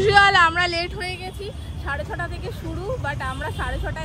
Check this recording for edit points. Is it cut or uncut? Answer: uncut